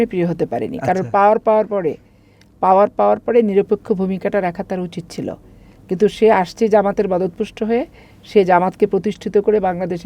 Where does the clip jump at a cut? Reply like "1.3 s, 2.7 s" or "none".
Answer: none